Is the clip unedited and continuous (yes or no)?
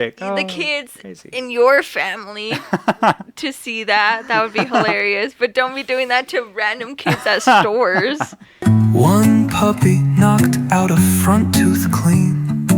no